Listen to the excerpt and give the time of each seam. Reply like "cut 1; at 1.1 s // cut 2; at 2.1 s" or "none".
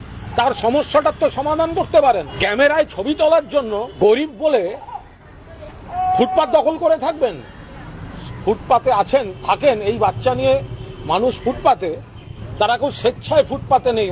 cut 1; at 2.3 s // cut 2; at 4.0 s // cut 3; at 8.2 s